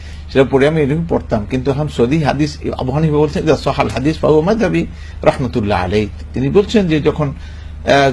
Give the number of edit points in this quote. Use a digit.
0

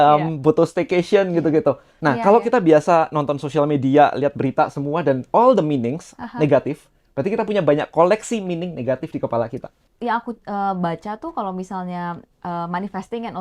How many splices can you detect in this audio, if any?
2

